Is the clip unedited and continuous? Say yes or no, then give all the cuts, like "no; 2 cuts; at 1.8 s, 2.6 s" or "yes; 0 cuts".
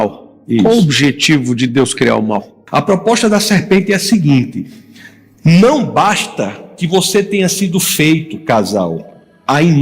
no; 1 cut; at 2.6 s